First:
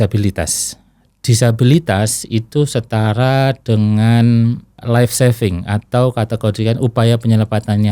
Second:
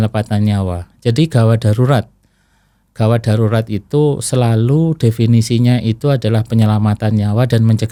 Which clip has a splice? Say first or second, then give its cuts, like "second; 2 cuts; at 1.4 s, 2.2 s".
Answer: first; 1 cut; at 4.7 s